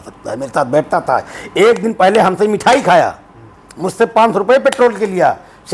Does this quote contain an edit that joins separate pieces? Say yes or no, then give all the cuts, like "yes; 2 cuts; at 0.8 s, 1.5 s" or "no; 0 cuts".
no; 0 cuts